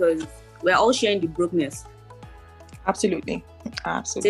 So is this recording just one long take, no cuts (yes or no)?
yes